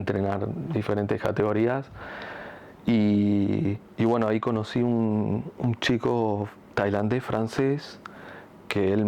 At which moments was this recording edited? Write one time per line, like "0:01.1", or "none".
none